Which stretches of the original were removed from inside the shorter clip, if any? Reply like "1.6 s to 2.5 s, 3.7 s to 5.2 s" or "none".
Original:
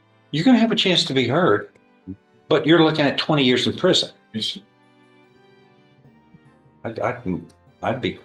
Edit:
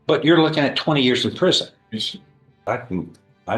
5.1 s to 7.0 s